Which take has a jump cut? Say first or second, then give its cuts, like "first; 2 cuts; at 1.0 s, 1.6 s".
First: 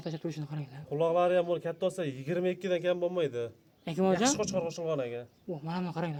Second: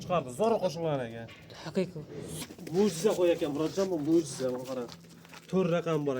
second; 1 cut; at 2.4 s